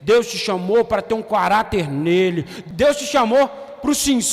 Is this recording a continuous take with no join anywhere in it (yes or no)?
no